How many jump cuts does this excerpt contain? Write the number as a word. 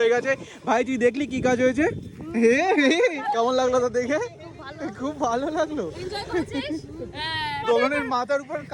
two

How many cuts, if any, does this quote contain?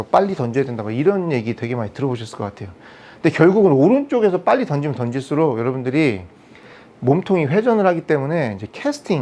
zero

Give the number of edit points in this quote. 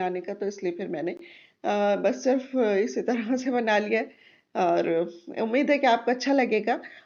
zero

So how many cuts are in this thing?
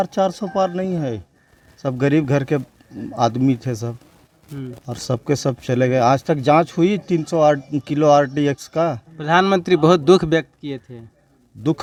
zero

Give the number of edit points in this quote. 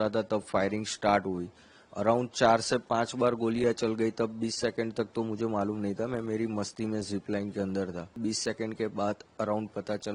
one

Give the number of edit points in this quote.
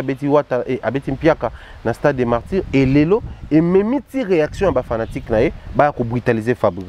zero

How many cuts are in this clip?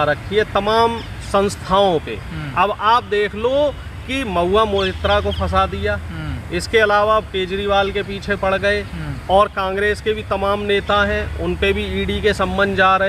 zero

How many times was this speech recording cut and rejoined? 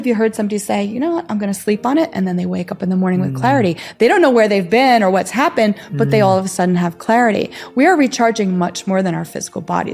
zero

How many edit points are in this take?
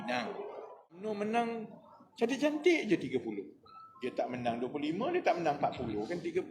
one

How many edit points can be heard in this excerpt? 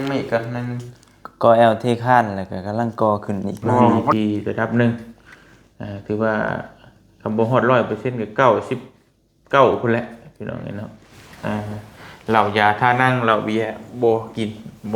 one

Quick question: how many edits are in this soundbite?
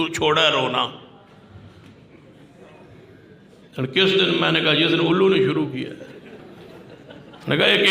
one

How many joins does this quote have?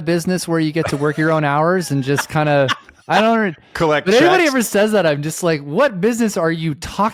zero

